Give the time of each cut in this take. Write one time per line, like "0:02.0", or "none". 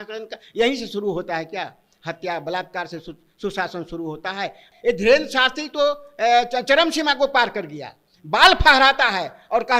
0:04.6